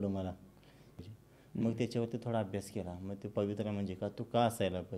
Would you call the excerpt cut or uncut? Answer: cut